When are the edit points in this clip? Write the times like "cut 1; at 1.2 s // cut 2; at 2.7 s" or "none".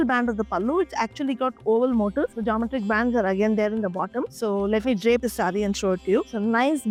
none